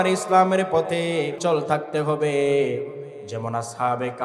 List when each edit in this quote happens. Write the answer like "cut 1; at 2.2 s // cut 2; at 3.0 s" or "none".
cut 1; at 1.4 s

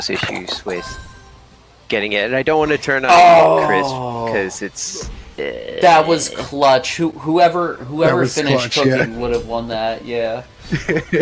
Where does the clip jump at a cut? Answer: none

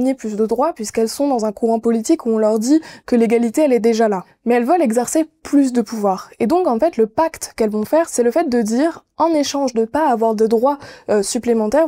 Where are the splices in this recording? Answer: cut 1; at 4.3 s // cut 2; at 8.1 s

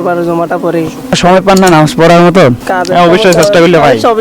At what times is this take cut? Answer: cut 1; at 1.2 s // cut 2; at 2.6 s

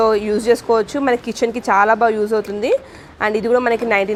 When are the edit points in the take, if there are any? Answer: none

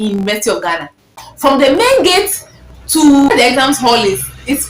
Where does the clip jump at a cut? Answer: cut 1; at 1.2 s // cut 2; at 3.3 s

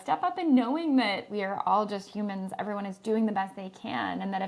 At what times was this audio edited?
cut 1; at 1.3 s

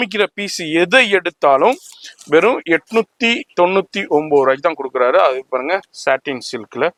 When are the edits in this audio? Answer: none

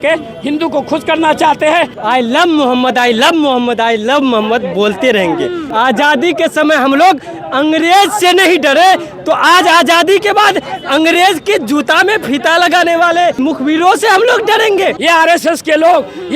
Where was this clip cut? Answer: cut 1; at 2.0 s // cut 2; at 5.6 s // cut 3; at 13.4 s // cut 4; at 15.0 s

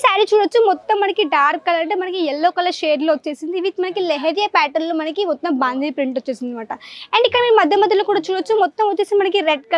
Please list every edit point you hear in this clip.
none

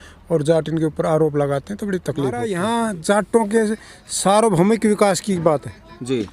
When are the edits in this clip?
cut 1; at 2.5 s

